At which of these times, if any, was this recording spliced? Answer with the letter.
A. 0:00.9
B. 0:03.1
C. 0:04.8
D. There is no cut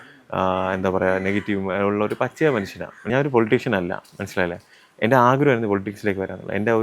B